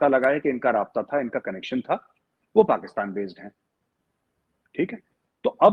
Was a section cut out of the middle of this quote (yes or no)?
no